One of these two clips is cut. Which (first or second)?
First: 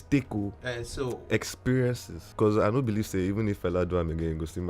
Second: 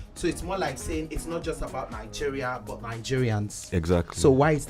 first